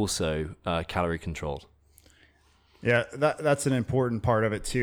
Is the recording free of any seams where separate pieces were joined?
yes; 0 cuts

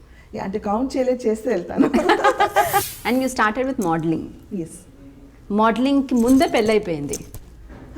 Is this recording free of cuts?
no; 1 cut; at 2.8 s

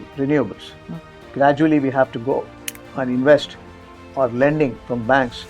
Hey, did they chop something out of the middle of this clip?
yes; 1 cut; at 1.3 s

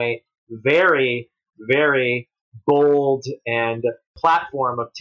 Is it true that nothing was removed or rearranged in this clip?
yes; 0 cuts

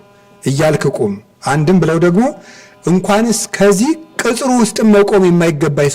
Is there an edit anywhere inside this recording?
no; 0 cuts

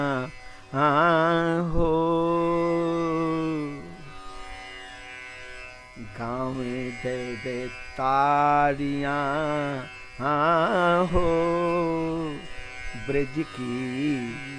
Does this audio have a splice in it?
no; 0 cuts

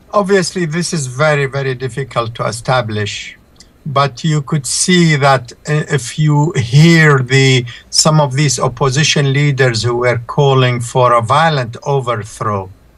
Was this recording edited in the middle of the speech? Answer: no; 0 cuts

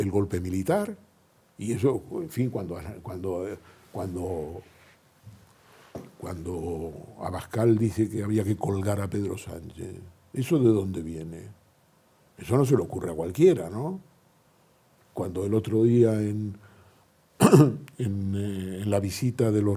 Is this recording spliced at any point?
no; 0 cuts

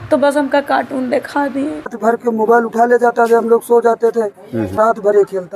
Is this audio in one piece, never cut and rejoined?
no; 2 cuts; at 2.0 s, 4.7 s

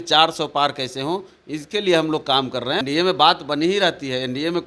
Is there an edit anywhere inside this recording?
yes; 1 cut; at 2.8 s

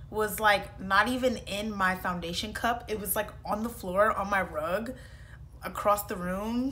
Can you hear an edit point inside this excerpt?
no; 0 cuts

